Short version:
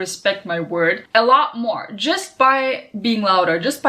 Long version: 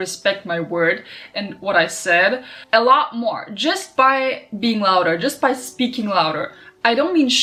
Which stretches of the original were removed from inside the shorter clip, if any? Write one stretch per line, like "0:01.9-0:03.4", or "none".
0:01.0-0:02.6